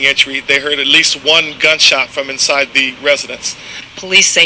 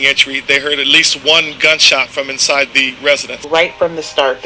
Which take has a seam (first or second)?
second